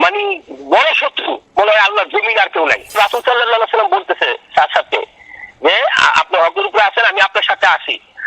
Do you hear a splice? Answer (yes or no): yes